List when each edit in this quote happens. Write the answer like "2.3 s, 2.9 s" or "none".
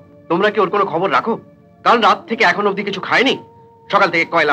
none